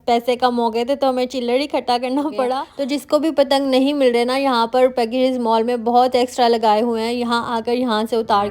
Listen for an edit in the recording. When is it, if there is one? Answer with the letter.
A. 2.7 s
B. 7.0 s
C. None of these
A